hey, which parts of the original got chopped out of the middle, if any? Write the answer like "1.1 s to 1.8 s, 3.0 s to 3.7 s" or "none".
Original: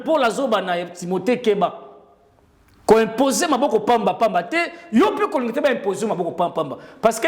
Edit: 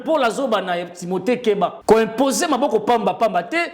1.8 s to 2.8 s